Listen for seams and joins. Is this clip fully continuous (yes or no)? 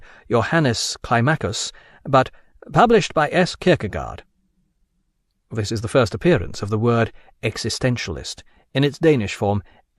no